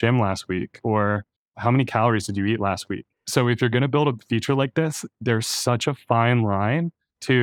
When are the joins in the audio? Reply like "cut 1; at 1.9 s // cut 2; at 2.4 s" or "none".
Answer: cut 1; at 3.1 s